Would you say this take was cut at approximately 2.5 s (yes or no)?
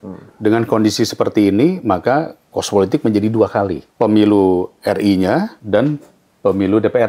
no